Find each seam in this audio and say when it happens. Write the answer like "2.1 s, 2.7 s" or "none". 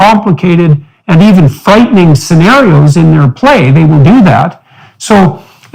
none